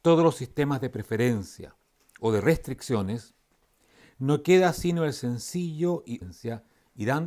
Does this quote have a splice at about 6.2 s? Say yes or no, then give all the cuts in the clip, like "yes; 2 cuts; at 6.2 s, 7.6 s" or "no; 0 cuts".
no; 0 cuts